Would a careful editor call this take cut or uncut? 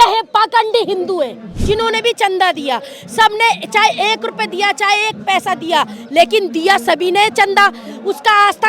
cut